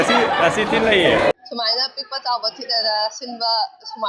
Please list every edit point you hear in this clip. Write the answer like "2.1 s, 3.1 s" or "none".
1.3 s